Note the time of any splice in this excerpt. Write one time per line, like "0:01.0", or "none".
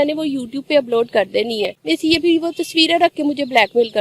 0:01.6